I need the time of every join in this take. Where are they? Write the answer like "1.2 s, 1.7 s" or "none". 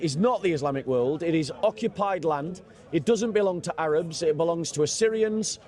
none